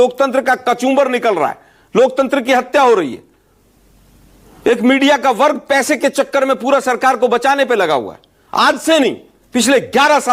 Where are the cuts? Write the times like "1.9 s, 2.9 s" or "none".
none